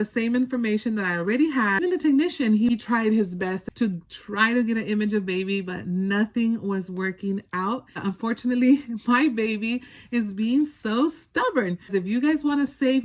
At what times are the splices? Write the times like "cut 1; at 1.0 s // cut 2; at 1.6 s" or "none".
cut 1; at 1.8 s // cut 2; at 2.7 s // cut 3; at 3.6 s // cut 4; at 8.0 s // cut 5; at 11.9 s